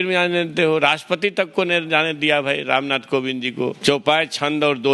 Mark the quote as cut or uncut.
cut